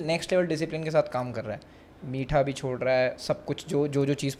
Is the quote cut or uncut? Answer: uncut